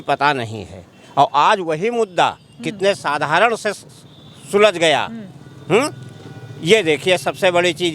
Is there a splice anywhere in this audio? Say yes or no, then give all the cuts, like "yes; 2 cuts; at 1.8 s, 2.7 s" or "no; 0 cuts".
no; 0 cuts